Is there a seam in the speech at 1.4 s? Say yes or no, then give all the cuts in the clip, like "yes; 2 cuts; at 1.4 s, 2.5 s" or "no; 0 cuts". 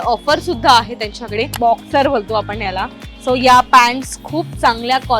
yes; 1 cut; at 1.4 s